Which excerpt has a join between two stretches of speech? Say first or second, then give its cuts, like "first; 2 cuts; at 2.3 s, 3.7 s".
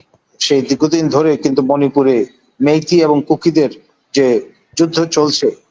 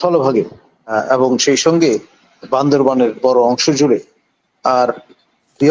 second; 1 cut; at 0.9 s